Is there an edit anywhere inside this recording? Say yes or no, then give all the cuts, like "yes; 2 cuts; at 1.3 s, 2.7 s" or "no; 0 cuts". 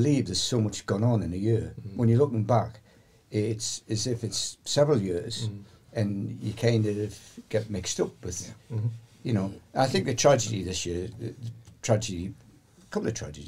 no; 0 cuts